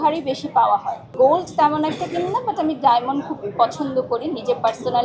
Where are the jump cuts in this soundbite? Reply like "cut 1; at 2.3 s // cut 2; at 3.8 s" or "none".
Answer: cut 1; at 1.0 s